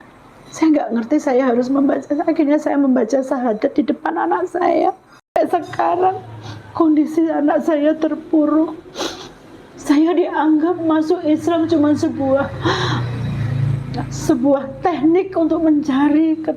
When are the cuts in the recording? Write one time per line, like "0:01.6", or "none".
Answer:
0:05.4

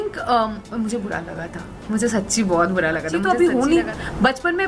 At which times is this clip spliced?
0:03.1

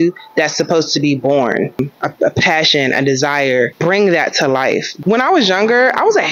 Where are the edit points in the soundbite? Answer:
0:01.8
0:03.7
0:04.9

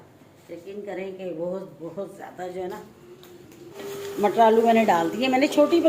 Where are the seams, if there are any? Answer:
0:03.8

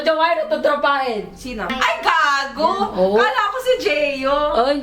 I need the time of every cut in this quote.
0:01.7

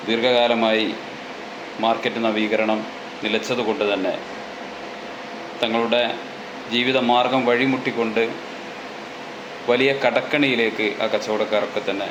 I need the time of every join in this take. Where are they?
none

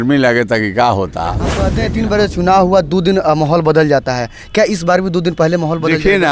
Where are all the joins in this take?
0:01.7

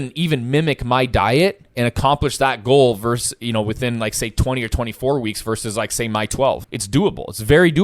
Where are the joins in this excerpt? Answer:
0:06.7

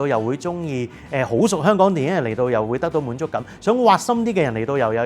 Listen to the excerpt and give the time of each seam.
none

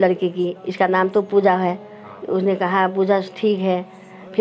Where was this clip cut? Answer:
none

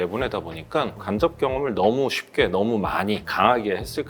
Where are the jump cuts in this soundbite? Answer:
0:00.9

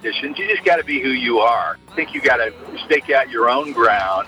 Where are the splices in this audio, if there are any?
0:01.9

